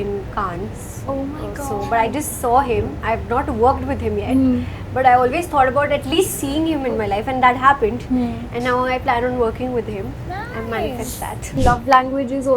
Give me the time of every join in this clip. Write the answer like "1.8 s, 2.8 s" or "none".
11.6 s